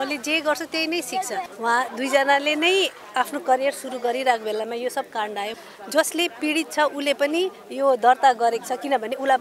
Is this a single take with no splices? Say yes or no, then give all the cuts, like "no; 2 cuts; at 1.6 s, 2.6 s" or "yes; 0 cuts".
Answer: no; 2 cuts; at 1.5 s, 5.5 s